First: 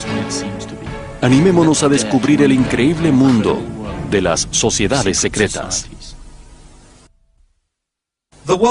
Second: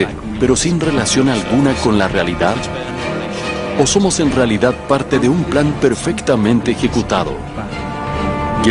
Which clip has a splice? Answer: second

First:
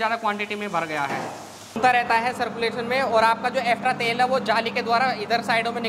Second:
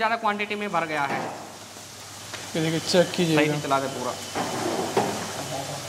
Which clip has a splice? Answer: first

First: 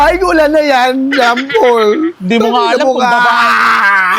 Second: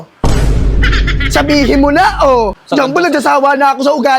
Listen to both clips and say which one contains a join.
second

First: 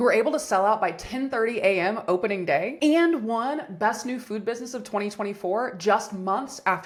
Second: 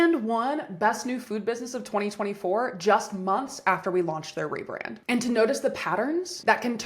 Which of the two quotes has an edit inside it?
second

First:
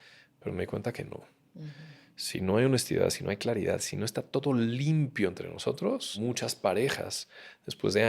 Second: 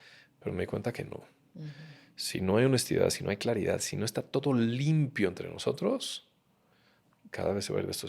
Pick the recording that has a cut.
first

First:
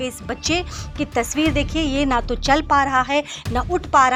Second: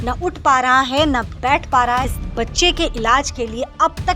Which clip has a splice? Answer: second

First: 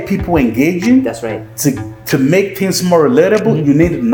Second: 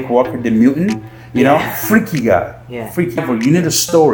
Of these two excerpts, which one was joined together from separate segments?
second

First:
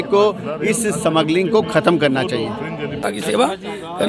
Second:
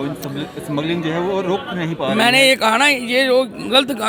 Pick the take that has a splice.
first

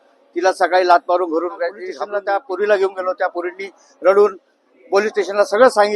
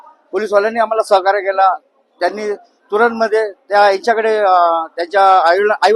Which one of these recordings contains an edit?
first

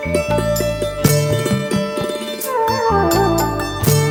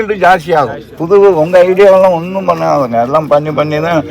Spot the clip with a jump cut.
second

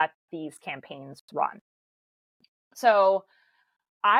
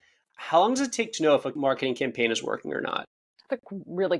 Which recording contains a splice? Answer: second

